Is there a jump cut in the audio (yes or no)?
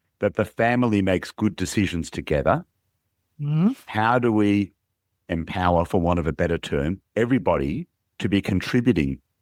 no